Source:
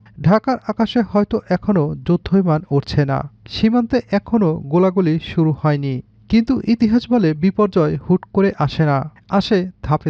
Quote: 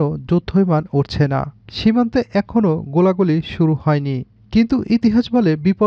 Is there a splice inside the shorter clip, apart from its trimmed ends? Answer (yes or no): no